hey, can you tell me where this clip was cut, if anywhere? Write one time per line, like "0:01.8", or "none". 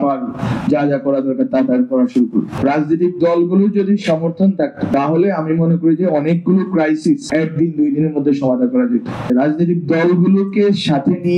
0:02.5
0:04.9
0:07.2
0:09.2